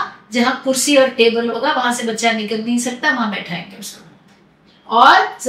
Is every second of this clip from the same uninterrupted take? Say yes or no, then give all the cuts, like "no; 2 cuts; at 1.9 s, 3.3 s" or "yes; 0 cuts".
yes; 0 cuts